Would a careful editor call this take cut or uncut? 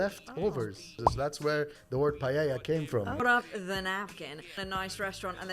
cut